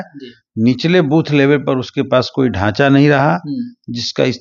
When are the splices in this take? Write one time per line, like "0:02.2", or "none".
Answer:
none